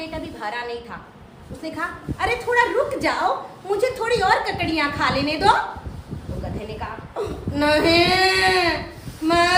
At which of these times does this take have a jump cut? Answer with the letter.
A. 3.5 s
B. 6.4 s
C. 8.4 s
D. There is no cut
D